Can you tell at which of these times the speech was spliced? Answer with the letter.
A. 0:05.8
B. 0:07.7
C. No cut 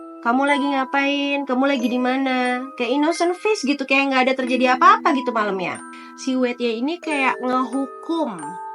A